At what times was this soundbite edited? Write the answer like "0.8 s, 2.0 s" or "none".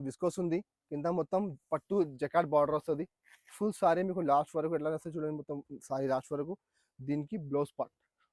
none

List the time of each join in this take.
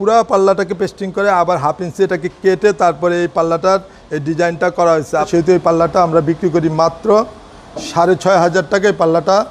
5.3 s

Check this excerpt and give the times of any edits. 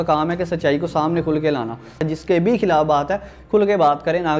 2.0 s

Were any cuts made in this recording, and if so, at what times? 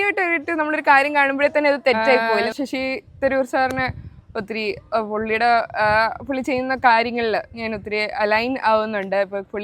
2.4 s

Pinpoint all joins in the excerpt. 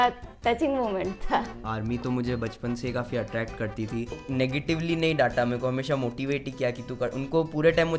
1.6 s, 4.2 s

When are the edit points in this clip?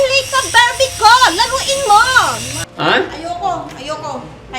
2.6 s

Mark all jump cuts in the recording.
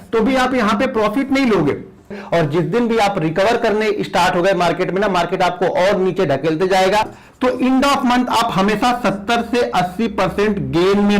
2.2 s, 7.2 s

